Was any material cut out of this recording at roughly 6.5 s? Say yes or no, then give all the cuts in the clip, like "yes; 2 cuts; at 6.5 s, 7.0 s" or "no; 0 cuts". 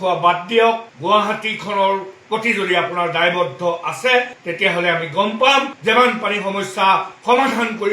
no; 1 cut; at 0.9 s